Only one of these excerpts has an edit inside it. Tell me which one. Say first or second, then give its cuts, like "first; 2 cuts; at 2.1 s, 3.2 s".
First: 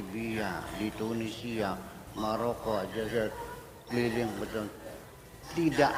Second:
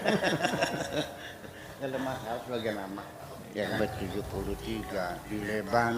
second; 1 cut; at 3.8 s